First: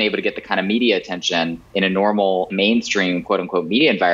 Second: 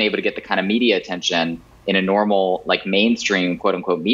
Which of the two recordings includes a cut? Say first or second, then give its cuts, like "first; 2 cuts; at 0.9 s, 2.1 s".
first; 2 cuts; at 1.6 s, 2.5 s